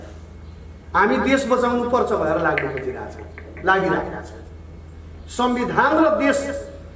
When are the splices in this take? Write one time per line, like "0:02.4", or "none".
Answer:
none